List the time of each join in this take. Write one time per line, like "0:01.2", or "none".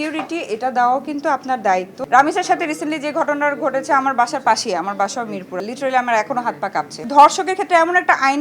0:02.0
0:05.6
0:07.0